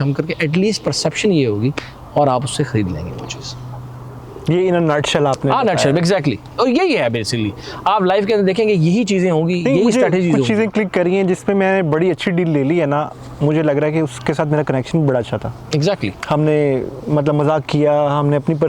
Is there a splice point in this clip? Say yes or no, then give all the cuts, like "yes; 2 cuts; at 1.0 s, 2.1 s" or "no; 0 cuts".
no; 0 cuts